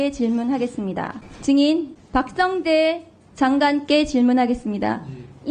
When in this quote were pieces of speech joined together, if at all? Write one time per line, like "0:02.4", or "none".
0:01.2
0:02.0